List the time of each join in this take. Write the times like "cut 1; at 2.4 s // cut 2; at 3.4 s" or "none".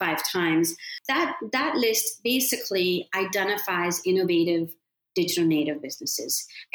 cut 1; at 0.9 s